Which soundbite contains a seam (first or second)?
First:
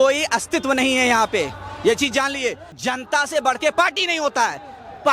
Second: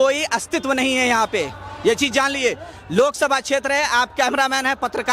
first